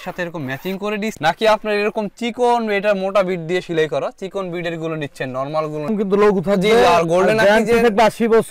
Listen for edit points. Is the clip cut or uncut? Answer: cut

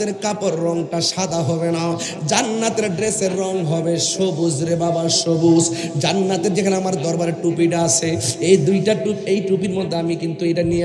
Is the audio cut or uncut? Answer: uncut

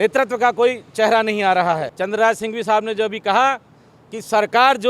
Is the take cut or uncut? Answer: cut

